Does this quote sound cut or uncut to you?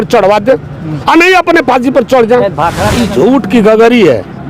cut